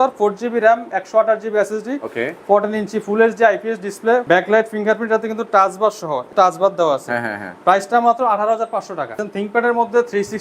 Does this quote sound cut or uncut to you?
cut